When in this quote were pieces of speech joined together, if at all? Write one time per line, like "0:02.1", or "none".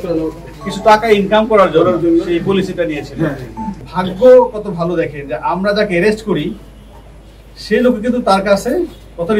0:03.8